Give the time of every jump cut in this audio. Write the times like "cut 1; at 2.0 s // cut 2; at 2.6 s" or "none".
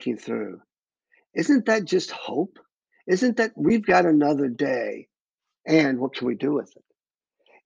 none